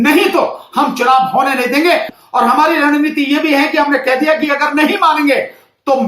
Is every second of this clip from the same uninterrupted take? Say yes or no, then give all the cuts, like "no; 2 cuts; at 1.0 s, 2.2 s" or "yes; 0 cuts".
no; 1 cut; at 2.2 s